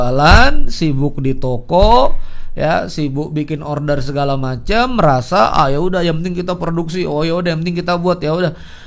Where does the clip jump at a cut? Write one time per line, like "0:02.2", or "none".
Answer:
none